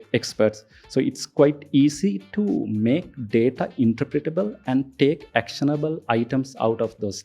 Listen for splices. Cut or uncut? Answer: uncut